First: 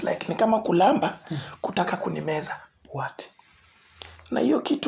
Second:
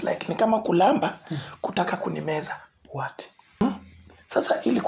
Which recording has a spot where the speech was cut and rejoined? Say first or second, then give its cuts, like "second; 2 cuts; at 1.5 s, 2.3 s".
second; 1 cut; at 3.6 s